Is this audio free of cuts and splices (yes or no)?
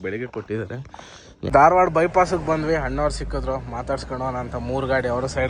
no